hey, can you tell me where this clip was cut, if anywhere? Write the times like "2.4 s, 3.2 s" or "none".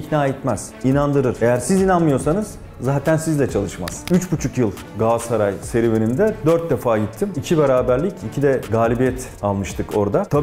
1.0 s, 4.0 s